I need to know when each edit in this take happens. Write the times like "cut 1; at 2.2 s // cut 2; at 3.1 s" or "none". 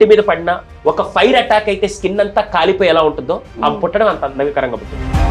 none